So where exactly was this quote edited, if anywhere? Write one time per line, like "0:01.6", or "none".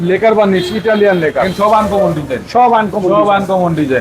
0:01.5